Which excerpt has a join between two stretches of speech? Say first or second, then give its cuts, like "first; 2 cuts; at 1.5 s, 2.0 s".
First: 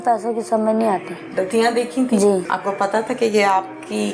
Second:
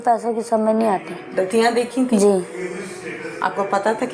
first; 1 cut; at 2.5 s